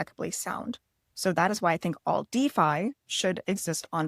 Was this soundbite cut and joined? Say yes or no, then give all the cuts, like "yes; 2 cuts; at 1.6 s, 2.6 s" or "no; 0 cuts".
no; 0 cuts